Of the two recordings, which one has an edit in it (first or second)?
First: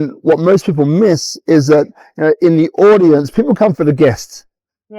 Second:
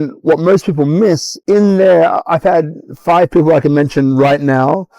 second